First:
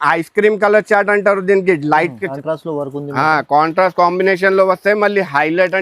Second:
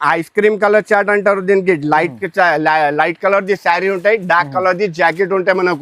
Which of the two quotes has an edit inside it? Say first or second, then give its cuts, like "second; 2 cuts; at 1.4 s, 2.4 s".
first; 1 cut; at 2.2 s